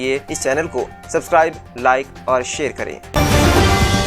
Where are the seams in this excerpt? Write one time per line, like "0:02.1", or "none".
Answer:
0:03.0